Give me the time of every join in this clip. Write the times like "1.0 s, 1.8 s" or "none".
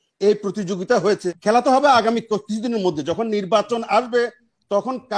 1.3 s